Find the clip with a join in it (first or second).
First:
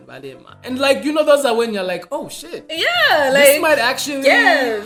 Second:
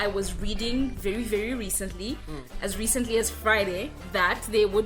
second